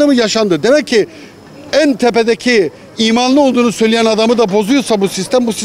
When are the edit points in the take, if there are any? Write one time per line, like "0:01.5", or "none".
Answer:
none

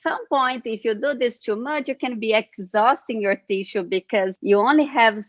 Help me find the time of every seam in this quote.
0:04.4

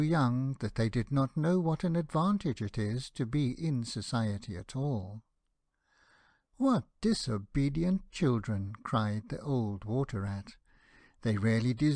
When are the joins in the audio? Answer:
none

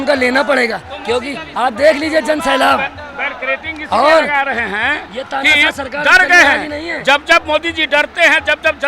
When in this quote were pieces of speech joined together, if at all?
none

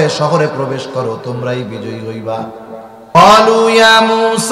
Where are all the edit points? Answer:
0:03.2

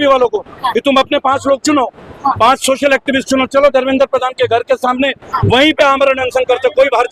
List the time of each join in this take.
none

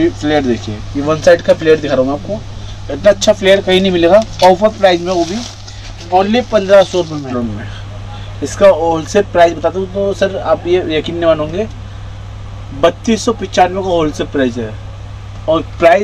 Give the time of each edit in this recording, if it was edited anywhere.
0:07.3

